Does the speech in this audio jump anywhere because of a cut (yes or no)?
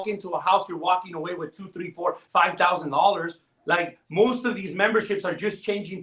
no